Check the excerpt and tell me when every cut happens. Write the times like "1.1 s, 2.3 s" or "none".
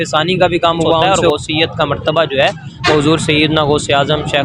1.1 s